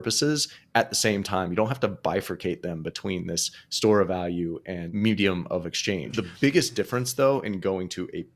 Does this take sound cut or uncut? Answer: cut